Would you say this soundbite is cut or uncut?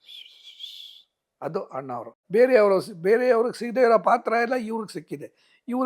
cut